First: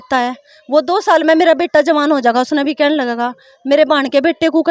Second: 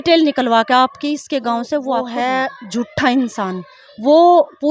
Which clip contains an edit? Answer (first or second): second